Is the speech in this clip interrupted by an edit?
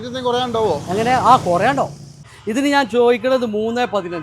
yes; 1 cut; at 2.3 s

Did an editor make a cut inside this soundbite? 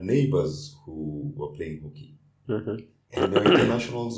yes; 1 cut; at 3.0 s

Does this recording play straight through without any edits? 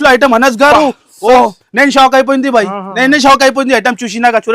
yes; 0 cuts

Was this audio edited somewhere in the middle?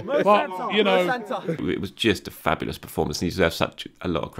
yes; 1 cut; at 1.6 s

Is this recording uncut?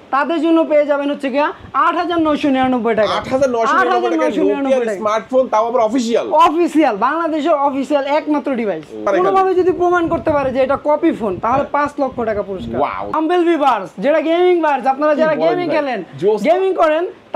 no; 2 cuts; at 9.1 s, 13.2 s

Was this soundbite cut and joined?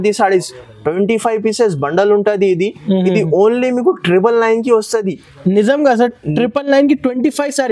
no; 0 cuts

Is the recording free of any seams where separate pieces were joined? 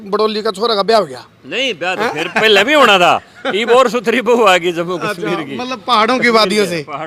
yes; 0 cuts

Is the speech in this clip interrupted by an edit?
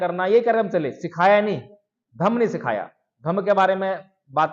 no; 0 cuts

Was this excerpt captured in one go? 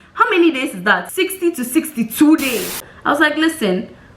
no; 2 cuts; at 1.1 s, 2.9 s

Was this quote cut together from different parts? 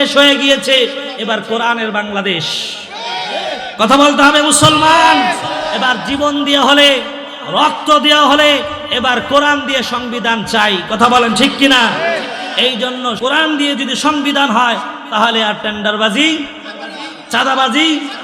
yes; 1 cut; at 13.2 s

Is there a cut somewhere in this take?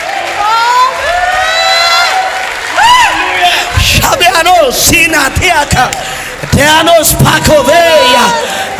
no; 0 cuts

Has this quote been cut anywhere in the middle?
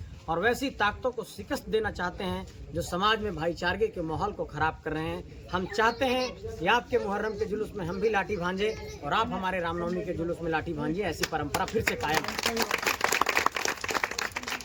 no; 0 cuts

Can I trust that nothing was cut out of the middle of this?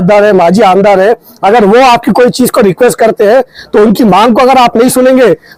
yes; 0 cuts

